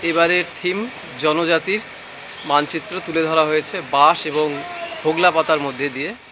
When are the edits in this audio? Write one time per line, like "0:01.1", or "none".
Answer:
none